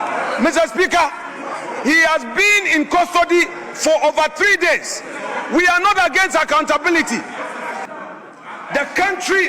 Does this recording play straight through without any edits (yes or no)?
no